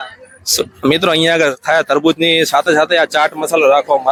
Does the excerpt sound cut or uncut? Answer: uncut